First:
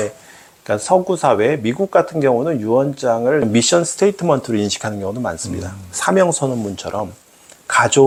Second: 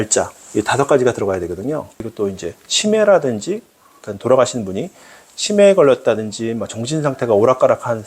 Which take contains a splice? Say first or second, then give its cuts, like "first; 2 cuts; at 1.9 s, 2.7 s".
second; 1 cut; at 1.9 s